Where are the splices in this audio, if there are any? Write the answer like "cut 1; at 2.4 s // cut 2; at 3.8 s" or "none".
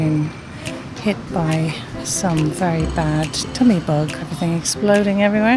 cut 1; at 4.2 s

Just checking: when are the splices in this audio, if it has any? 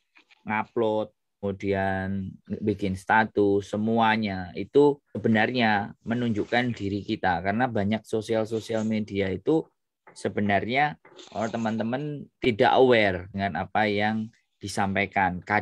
cut 1; at 1.4 s // cut 2; at 5.2 s // cut 3; at 12.3 s // cut 4; at 13.3 s

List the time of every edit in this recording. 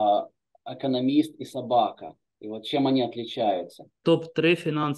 cut 1; at 3.9 s

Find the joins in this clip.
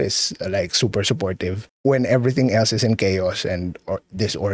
none

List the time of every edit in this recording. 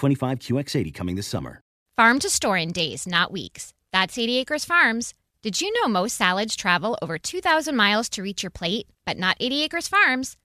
cut 1; at 1.8 s

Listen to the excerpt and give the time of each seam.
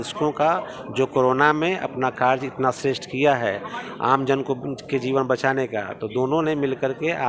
none

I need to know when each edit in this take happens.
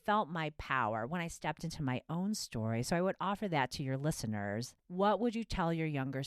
cut 1; at 4.8 s

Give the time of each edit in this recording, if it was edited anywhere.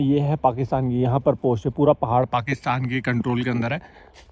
none

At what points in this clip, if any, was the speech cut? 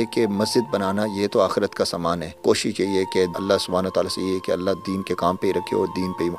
cut 1; at 2.3 s // cut 2; at 3.4 s

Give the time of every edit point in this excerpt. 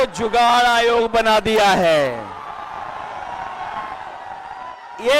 none

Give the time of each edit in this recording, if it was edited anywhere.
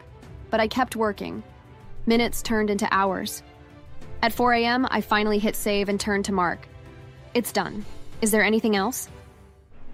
none

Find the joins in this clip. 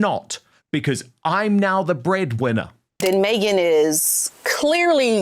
cut 1; at 2.8 s

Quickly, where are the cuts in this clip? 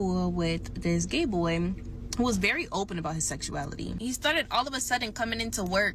cut 1; at 4.0 s

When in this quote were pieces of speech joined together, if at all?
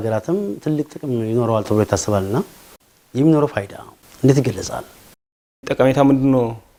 none

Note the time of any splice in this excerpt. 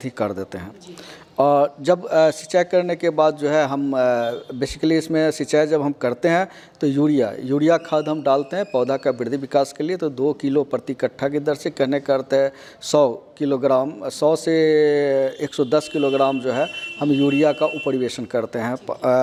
none

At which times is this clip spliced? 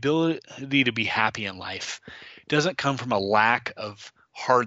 none

